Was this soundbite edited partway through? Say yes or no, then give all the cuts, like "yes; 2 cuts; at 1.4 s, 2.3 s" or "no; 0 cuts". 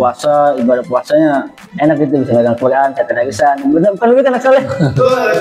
no; 0 cuts